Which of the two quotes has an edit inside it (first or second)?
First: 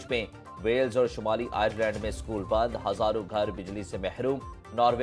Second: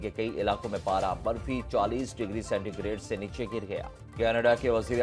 second